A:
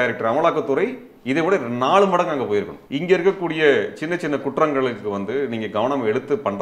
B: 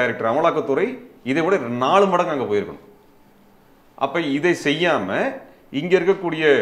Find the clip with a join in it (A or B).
A